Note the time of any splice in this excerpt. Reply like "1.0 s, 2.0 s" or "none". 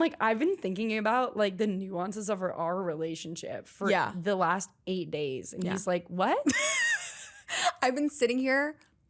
6.4 s